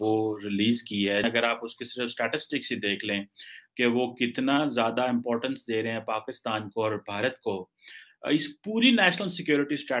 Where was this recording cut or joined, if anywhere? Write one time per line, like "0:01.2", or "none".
0:01.2